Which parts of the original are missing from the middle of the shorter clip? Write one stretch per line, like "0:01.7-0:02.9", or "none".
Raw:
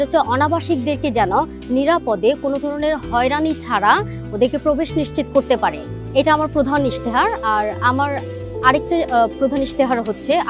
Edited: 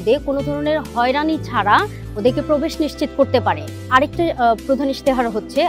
0:05.9-0:08.5